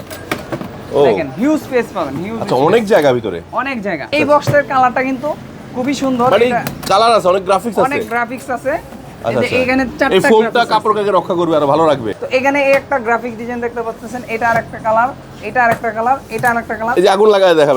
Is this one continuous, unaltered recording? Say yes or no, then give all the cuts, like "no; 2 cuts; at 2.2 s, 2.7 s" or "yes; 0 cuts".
no; 3 cuts; at 4.1 s, 12.1 s, 16.9 s